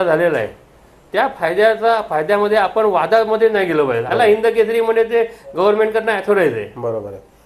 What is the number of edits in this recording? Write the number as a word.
one